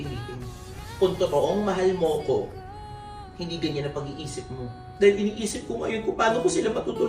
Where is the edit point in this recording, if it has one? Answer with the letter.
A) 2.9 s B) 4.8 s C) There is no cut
B